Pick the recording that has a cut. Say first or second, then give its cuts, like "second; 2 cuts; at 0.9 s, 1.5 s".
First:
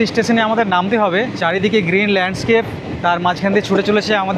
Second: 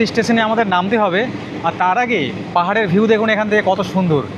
first; 2 cuts; at 1.3 s, 2.8 s